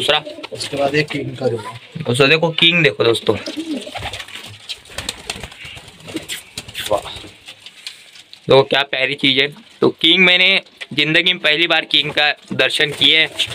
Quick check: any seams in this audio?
no; 0 cuts

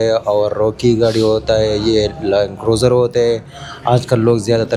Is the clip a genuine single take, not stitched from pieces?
yes; 0 cuts

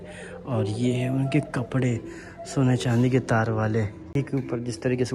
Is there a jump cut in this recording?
yes; 1 cut; at 4.1 s

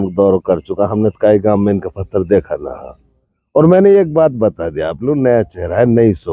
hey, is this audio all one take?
yes; 0 cuts

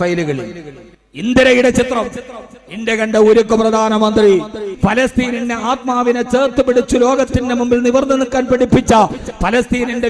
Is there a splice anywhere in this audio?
yes; 1 cut; at 4.7 s

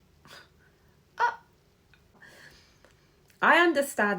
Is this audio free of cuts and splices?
no; 1 cut; at 2.2 s

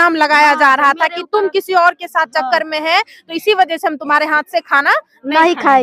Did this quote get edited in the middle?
no; 0 cuts

